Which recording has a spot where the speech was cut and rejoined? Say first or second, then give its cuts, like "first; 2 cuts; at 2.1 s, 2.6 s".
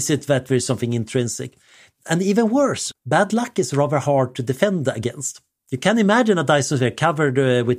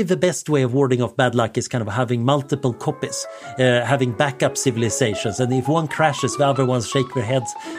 first; 1 cut; at 2.9 s